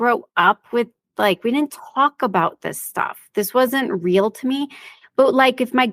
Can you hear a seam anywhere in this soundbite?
no; 0 cuts

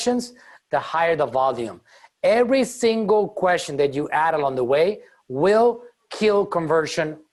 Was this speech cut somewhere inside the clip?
no; 0 cuts

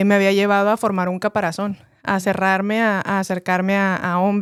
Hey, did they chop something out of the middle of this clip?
no; 0 cuts

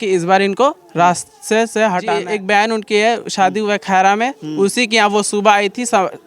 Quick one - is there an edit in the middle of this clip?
yes; 1 cut; at 2.1 s

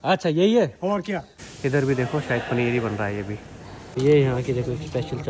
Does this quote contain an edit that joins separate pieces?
yes; 2 cuts; at 1.3 s, 3.8 s

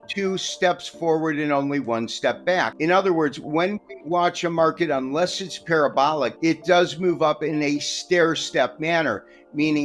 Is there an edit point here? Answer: yes; 2 cuts; at 2.7 s, 6.3 s

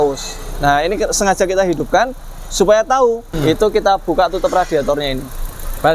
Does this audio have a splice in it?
yes; 1 cut; at 3.3 s

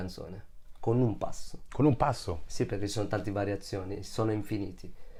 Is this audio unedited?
yes; 0 cuts

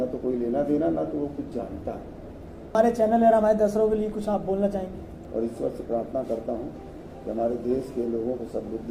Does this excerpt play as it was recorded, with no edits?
no; 2 cuts; at 2.8 s, 5.1 s

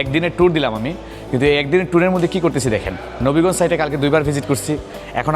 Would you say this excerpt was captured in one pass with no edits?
yes; 0 cuts

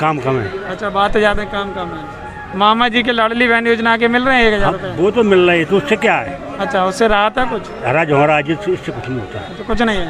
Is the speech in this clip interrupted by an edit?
no; 0 cuts

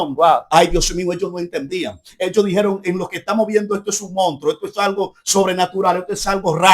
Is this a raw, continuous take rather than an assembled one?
yes; 0 cuts

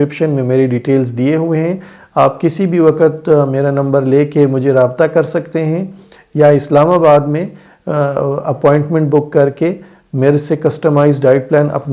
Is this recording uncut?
yes; 0 cuts

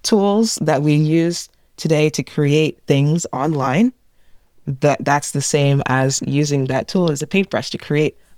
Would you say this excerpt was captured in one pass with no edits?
yes; 0 cuts

